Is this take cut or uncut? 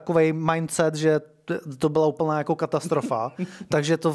uncut